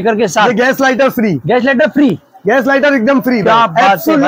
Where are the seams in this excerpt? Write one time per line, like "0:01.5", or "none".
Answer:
none